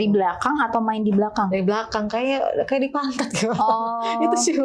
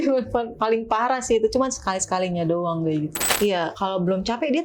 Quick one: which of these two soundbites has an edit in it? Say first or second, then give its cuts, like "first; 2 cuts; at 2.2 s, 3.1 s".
second; 1 cut; at 3.2 s